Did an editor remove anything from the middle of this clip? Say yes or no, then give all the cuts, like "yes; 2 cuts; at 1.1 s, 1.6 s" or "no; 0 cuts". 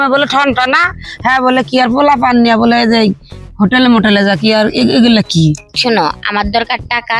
yes; 1 cut; at 5.7 s